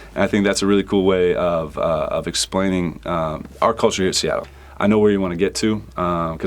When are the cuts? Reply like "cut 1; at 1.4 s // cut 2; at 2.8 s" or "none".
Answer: cut 1; at 4.4 s